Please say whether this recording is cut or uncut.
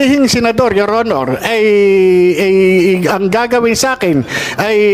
uncut